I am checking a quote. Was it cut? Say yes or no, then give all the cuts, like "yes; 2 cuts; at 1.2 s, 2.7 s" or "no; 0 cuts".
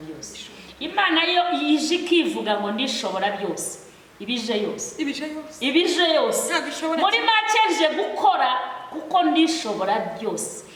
no; 0 cuts